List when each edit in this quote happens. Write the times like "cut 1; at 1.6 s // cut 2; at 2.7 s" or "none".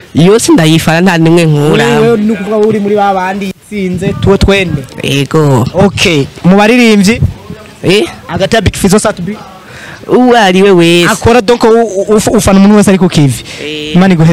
none